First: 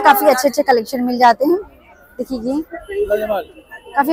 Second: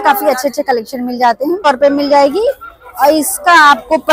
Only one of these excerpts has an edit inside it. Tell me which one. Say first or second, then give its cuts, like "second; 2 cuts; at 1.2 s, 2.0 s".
second; 1 cut; at 1.7 s